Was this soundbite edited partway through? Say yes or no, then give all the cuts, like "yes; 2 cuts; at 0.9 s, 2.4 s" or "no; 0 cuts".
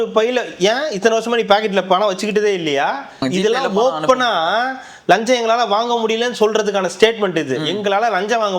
yes; 1 cut; at 3.2 s